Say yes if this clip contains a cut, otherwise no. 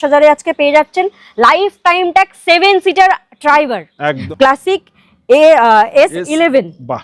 yes